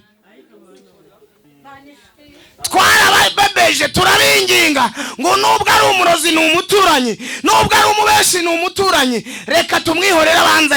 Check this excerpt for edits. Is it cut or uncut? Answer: cut